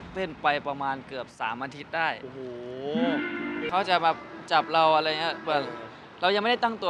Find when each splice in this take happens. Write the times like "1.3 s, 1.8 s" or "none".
3.7 s